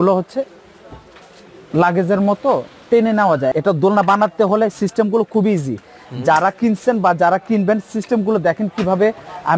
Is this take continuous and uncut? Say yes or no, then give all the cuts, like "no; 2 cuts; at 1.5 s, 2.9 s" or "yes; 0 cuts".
no; 1 cut; at 3.5 s